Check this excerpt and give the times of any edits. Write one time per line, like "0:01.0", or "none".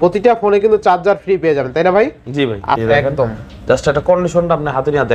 0:03.0

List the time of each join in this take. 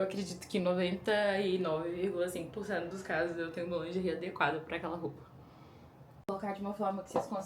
0:06.3

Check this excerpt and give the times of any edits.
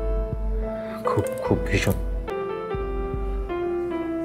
0:02.2

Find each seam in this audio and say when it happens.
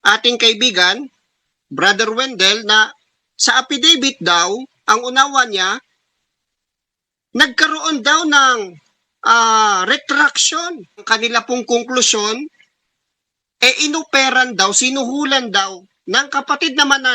0:11.1

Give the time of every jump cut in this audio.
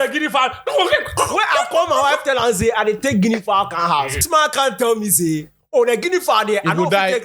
0:04.2

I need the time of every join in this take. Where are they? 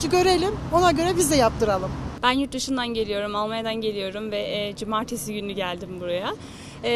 none

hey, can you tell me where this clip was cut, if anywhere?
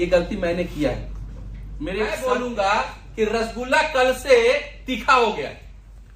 0:02.0

